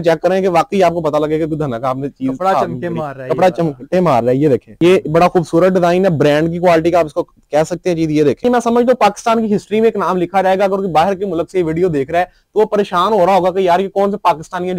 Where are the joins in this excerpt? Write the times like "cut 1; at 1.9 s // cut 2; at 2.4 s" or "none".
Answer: cut 1; at 4.7 s // cut 2; at 8.4 s